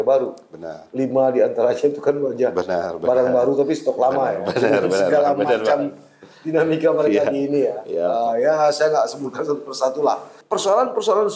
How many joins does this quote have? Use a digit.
1